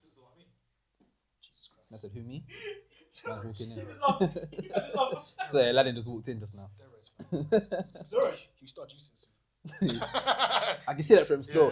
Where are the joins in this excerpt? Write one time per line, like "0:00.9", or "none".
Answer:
none